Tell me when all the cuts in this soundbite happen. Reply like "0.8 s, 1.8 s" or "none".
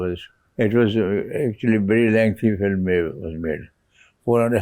none